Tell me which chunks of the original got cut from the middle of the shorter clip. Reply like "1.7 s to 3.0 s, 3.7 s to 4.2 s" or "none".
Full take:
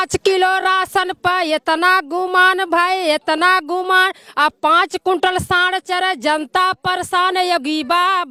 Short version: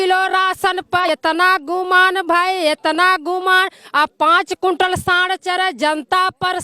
1.4 s to 1.5 s